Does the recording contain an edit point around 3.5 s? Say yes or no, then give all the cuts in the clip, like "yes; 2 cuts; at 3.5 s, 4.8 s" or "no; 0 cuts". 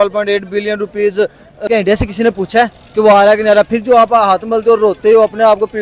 no; 1 cut; at 1.6 s